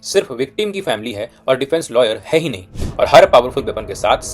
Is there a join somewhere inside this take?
yes; 1 cut; at 2.7 s

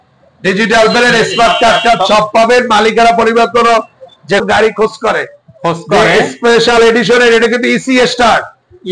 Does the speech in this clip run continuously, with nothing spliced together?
no; 1 cut; at 4.4 s

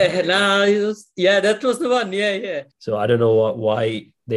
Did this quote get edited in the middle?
yes; 1 cut; at 2.7 s

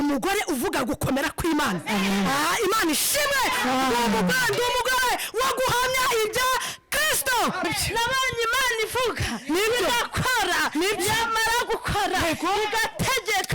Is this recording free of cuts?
no; 1 cut; at 7.7 s

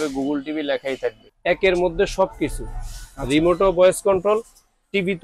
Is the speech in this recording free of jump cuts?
no; 1 cut; at 1.3 s

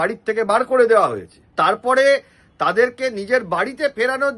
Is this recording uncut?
yes; 0 cuts

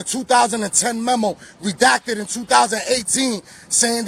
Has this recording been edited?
no; 0 cuts

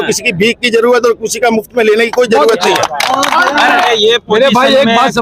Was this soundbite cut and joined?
yes; 1 cut; at 3.9 s

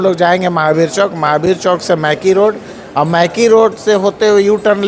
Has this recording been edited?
no; 0 cuts

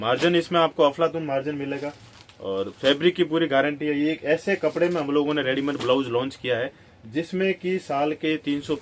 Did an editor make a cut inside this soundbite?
no; 0 cuts

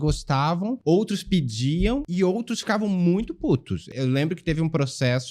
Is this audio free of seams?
no; 3 cuts; at 0.8 s, 2.1 s, 3.9 s

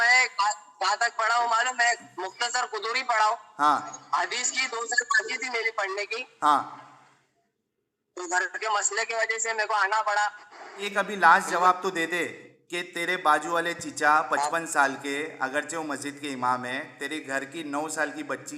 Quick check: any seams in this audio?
yes; 1 cut; at 10.9 s

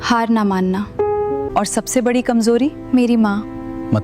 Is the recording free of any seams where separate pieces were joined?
no; 1 cut; at 1.5 s

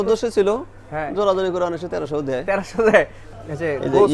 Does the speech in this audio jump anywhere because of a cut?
yes; 1 cut; at 3.2 s

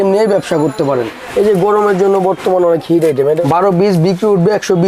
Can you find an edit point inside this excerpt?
yes; 2 cuts; at 1.3 s, 3.4 s

